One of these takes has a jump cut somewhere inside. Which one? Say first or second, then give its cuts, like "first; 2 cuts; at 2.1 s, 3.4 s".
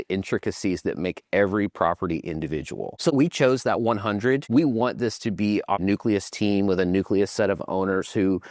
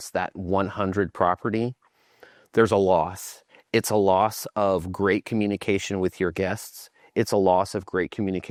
first; 3 cuts; at 3.1 s, 4.4 s, 5.8 s